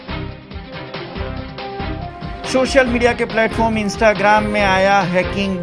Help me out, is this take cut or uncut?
cut